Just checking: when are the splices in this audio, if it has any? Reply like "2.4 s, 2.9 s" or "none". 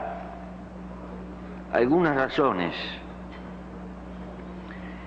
3.1 s